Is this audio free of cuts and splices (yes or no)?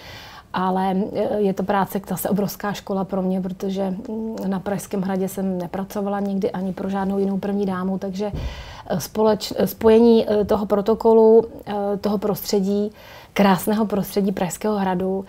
yes